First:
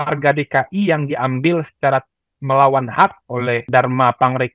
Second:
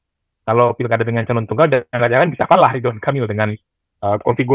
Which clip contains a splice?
first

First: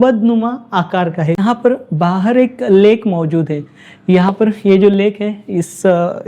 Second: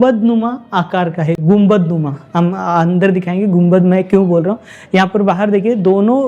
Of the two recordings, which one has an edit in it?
first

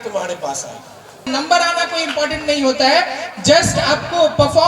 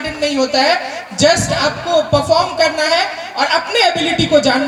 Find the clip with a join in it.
first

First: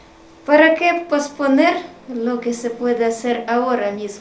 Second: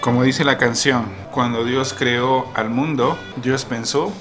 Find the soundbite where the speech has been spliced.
second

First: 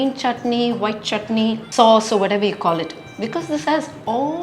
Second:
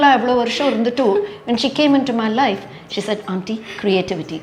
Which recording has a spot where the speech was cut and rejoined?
first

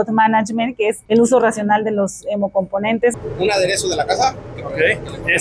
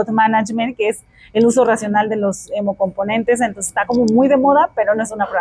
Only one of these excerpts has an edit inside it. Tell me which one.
first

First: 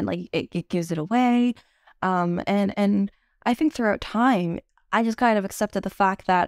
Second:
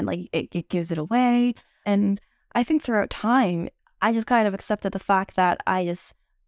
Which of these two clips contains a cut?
second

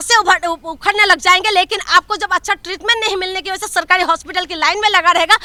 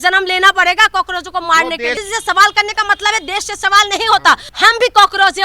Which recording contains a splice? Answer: second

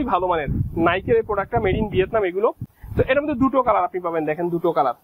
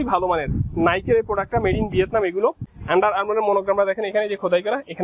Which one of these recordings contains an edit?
second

